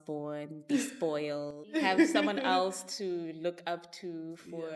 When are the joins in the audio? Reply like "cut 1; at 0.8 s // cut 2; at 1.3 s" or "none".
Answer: cut 1; at 1.6 s